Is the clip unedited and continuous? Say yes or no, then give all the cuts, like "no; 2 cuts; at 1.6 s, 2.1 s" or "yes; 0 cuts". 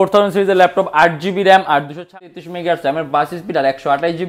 no; 1 cut; at 2.1 s